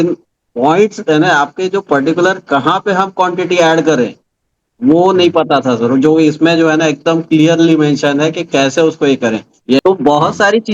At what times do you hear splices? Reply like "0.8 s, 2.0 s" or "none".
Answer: 9.8 s